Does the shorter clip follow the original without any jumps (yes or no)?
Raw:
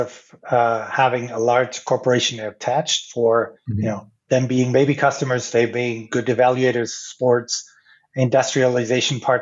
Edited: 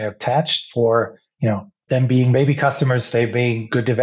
yes